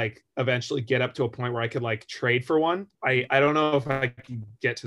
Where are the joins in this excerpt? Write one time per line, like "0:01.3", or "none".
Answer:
0:02.9